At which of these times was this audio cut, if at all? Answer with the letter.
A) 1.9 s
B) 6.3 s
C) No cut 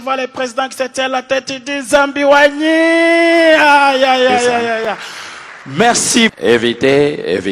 B